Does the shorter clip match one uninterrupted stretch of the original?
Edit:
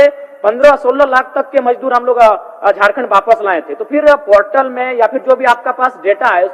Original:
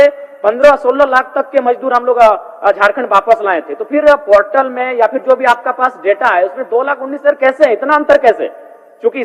yes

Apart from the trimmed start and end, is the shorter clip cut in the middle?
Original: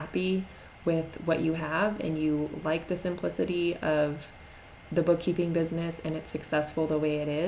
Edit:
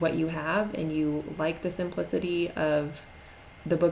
no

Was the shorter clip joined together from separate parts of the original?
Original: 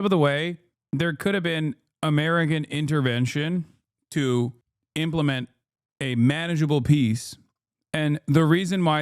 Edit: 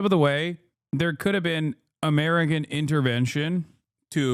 no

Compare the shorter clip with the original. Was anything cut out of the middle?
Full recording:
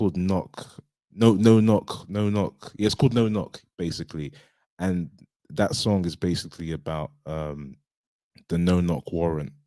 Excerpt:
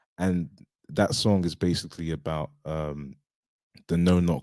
no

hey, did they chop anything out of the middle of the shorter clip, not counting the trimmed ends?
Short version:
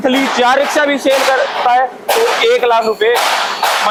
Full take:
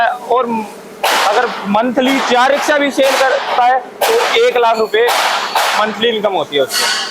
no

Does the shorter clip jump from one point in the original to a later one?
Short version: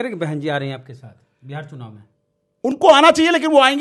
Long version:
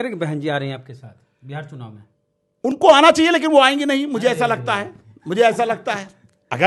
no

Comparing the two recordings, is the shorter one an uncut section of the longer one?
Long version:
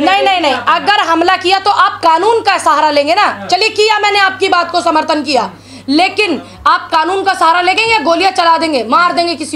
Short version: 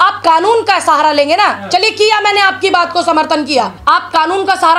no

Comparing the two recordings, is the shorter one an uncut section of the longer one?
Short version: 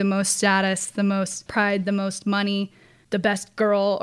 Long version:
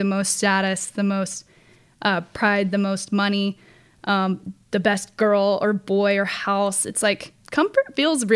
no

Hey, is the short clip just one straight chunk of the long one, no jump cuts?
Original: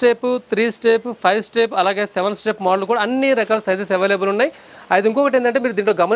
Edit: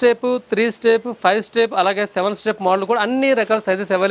yes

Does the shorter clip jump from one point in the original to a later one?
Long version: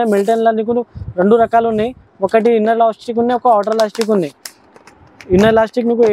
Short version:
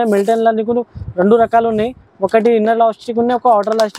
no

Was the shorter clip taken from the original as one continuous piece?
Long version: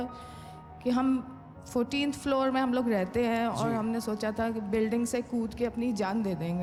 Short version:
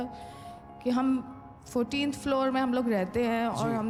yes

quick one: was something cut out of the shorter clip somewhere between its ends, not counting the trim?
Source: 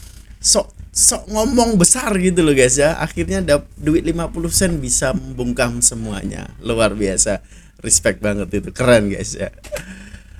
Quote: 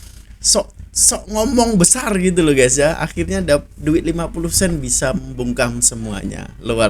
no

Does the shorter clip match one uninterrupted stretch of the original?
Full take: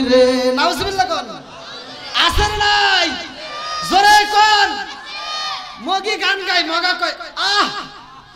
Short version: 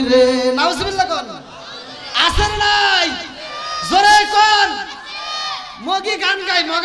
yes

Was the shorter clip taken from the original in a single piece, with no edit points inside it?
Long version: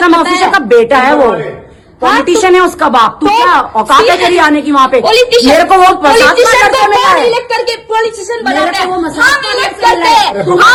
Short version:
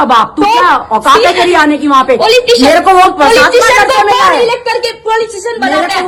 yes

